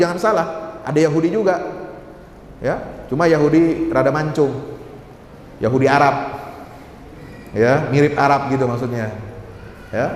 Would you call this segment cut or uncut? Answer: uncut